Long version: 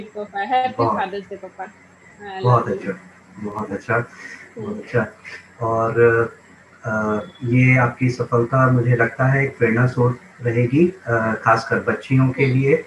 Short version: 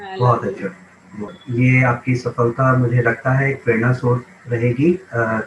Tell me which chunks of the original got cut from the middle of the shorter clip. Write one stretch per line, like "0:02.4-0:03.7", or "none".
0:03.6-0:07.3